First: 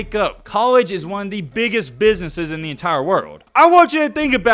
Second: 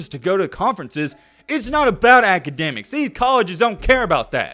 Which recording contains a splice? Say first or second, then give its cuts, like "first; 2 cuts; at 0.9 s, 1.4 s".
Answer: first; 1 cut; at 3.4 s